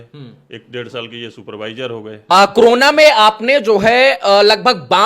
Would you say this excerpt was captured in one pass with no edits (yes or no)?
no